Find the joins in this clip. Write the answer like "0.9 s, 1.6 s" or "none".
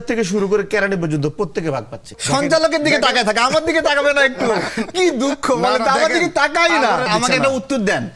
2.2 s, 7.1 s